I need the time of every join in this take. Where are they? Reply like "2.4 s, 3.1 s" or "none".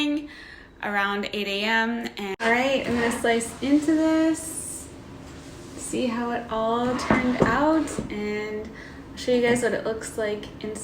2.4 s